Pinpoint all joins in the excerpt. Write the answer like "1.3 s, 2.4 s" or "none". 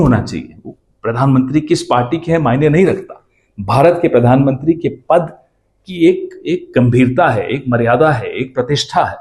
none